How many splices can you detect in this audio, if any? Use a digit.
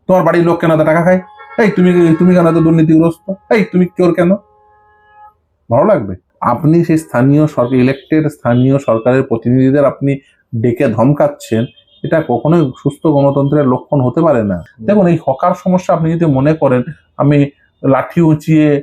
2